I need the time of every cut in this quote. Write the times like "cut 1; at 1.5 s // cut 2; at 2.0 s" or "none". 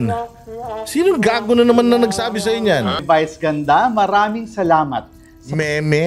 cut 1; at 3.0 s